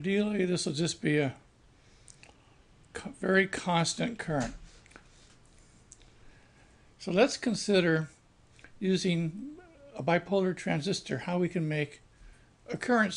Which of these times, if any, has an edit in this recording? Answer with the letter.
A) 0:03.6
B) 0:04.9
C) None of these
A